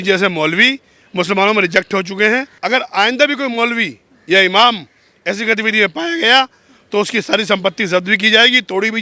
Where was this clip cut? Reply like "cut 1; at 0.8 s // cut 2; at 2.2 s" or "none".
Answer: cut 1; at 2.5 s

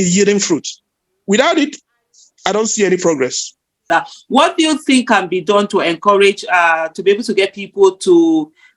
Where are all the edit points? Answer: cut 1; at 3.8 s

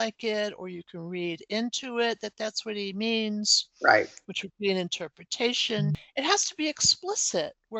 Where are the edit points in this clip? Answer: cut 1; at 6.0 s

